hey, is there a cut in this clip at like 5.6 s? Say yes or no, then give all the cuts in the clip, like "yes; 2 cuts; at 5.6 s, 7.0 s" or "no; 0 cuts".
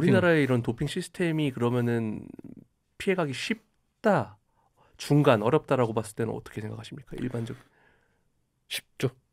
no; 0 cuts